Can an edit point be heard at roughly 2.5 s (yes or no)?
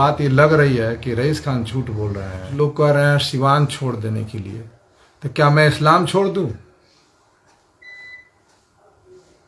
yes